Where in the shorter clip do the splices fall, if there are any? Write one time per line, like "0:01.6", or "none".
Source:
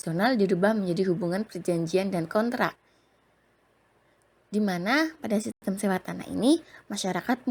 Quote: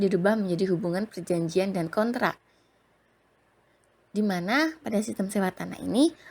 0:05.1